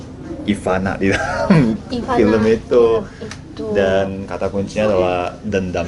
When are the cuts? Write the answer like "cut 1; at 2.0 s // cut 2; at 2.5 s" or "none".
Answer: none

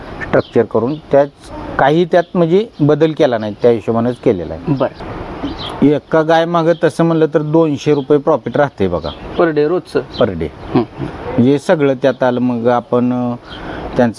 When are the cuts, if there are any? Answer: cut 1; at 5.0 s

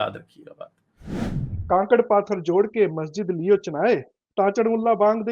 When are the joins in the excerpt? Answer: cut 1; at 1.1 s

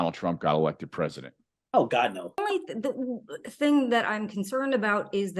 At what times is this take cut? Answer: cut 1; at 2.4 s

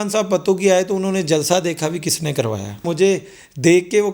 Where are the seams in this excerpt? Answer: cut 1; at 2.9 s

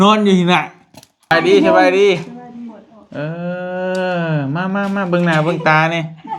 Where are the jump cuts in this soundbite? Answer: cut 1; at 1.3 s

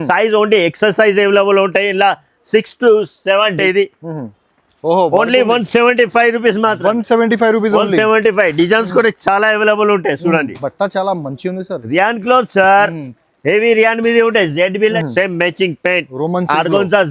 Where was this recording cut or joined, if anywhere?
cut 1; at 3.6 s // cut 2; at 15.0 s

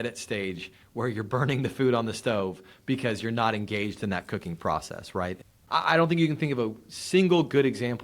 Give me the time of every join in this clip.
cut 1; at 5.4 s

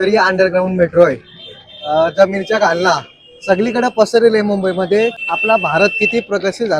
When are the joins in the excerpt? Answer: cut 1; at 5.2 s

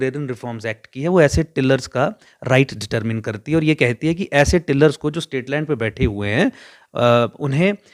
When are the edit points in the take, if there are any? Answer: none

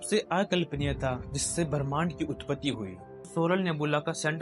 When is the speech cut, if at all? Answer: cut 1; at 3.2 s

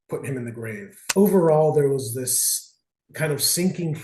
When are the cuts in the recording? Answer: cut 1; at 1.0 s

